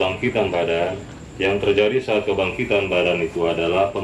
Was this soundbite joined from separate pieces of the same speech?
no; 0 cuts

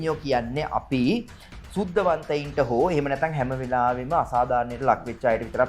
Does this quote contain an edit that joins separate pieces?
no; 0 cuts

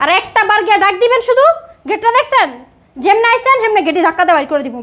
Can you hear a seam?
no; 0 cuts

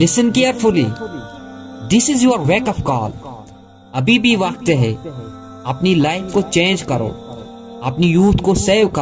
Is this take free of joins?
yes; 0 cuts

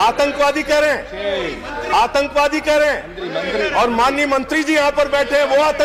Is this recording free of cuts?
yes; 0 cuts

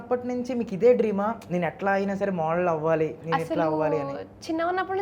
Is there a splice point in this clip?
no; 0 cuts

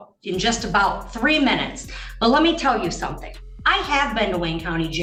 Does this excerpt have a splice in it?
no; 0 cuts

